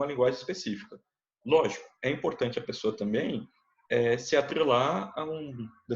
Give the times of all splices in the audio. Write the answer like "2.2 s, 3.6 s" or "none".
none